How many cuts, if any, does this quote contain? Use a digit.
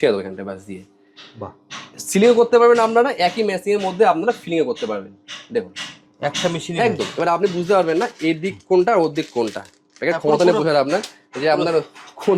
0